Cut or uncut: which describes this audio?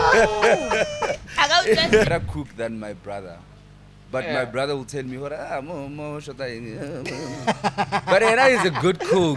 cut